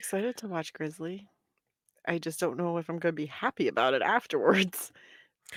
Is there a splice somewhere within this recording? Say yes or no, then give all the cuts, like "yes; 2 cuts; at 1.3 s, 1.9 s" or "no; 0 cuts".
no; 0 cuts